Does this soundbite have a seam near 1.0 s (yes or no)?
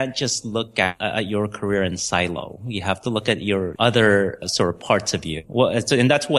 yes